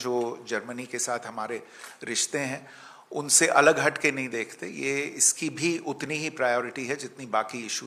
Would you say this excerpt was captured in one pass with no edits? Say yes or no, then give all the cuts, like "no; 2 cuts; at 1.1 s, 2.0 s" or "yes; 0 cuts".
yes; 0 cuts